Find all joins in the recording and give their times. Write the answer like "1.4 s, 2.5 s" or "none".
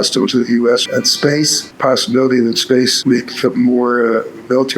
1.2 s, 3.0 s